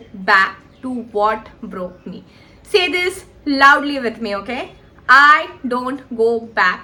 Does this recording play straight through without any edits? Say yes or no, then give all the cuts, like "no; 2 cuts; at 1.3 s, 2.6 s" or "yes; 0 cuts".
yes; 0 cuts